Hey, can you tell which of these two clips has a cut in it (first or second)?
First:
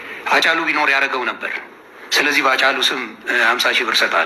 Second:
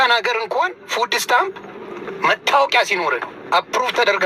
first